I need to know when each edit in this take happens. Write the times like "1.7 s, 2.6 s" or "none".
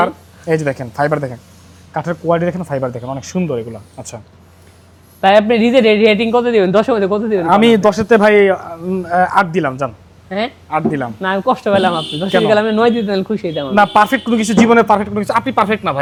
none